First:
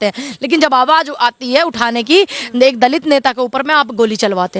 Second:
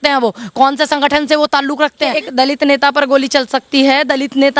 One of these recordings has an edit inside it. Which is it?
second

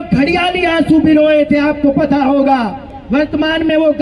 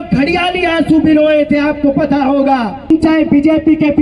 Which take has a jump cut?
second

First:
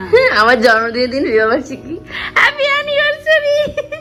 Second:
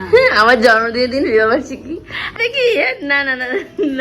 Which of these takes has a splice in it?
second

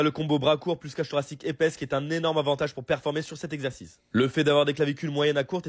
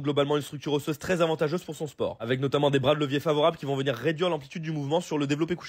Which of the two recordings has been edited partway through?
second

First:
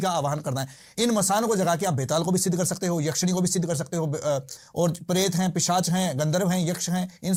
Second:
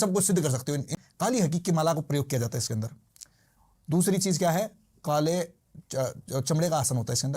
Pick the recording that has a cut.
second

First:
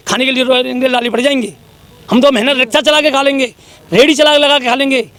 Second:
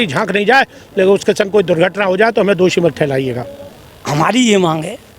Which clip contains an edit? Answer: second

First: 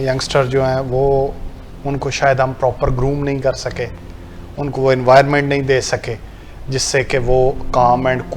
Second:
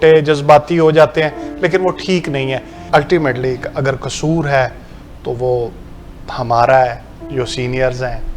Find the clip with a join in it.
second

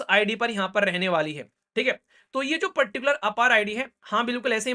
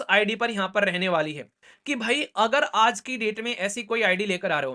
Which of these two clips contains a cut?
second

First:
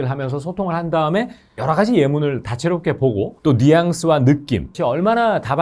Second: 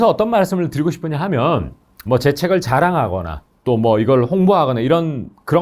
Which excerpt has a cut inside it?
first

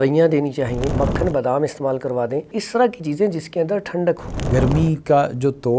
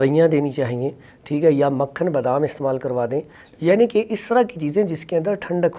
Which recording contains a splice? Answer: first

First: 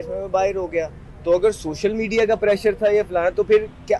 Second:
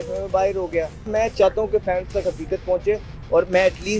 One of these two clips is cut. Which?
second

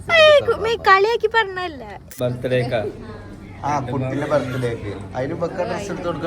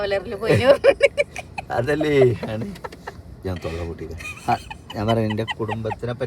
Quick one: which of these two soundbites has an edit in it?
first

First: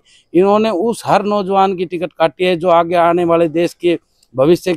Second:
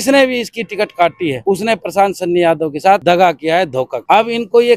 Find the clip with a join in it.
second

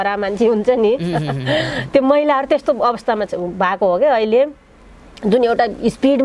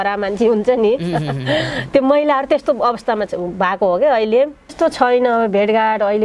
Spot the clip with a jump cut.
second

